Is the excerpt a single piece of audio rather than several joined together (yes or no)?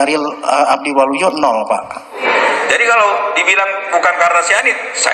no